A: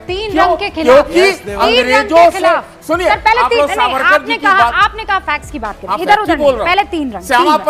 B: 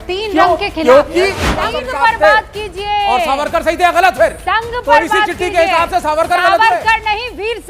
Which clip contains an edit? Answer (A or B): B